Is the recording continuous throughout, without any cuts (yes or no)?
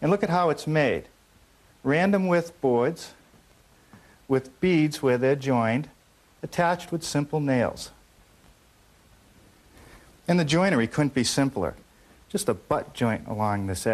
no